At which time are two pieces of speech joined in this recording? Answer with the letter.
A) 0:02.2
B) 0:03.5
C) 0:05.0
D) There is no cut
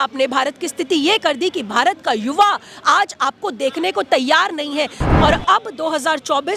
C